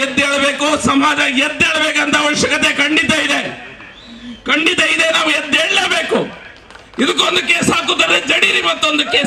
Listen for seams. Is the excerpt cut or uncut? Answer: uncut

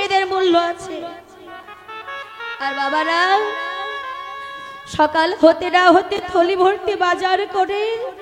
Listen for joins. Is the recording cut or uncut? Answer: uncut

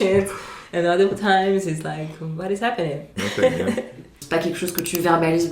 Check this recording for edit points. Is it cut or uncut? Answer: cut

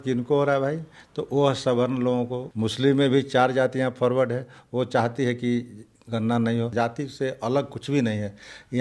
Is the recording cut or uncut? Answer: cut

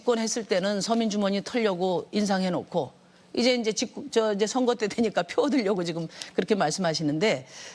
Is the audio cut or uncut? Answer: cut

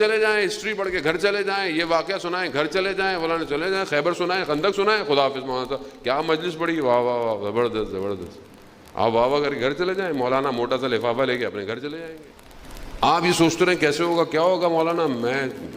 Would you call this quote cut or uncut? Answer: cut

